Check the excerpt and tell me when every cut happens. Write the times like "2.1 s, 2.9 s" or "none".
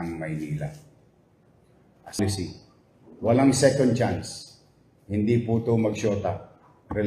2.2 s

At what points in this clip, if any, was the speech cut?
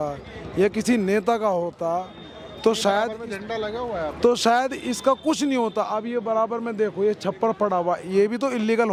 none

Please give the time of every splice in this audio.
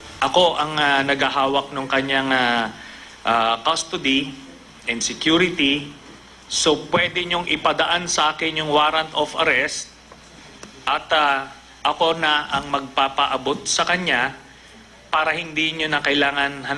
8.4 s

